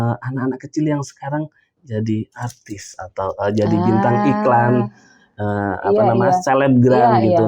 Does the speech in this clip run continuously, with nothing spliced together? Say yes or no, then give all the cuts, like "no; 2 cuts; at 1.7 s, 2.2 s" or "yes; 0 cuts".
yes; 0 cuts